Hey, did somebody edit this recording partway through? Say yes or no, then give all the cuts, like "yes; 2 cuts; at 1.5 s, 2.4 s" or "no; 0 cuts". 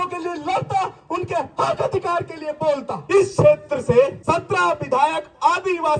yes; 2 cuts; at 2.9 s, 4.2 s